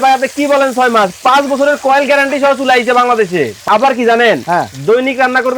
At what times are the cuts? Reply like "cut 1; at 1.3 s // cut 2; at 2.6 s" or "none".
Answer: cut 1; at 3.6 s